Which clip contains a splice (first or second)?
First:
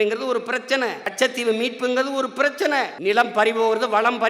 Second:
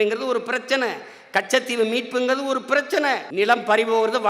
first